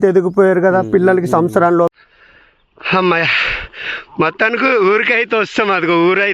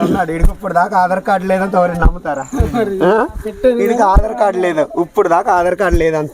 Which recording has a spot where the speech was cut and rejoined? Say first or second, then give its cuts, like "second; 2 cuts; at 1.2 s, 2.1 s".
first; 1 cut; at 1.9 s